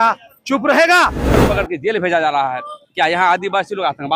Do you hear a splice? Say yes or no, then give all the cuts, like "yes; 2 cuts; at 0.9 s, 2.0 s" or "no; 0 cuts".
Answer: yes; 1 cut; at 1.4 s